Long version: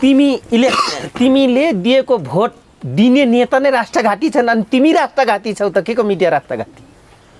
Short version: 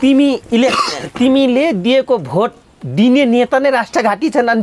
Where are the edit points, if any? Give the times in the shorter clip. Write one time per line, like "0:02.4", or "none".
none